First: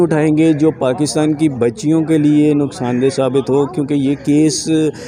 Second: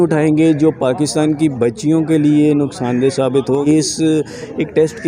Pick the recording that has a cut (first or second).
second